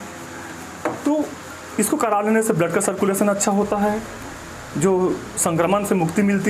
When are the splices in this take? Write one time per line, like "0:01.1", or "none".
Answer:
0:01.0